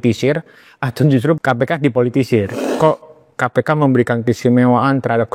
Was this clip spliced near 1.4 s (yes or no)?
yes